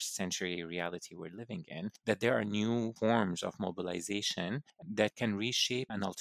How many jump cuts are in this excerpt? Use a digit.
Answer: 3